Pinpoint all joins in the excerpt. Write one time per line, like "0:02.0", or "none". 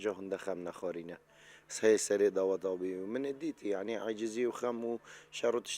none